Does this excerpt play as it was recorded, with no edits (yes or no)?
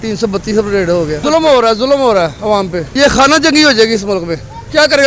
yes